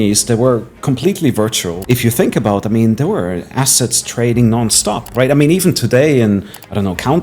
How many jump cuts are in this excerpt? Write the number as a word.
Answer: one